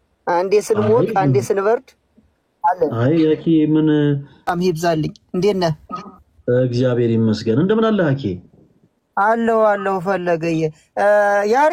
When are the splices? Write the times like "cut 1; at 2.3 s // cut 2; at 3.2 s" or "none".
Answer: cut 1; at 4.5 s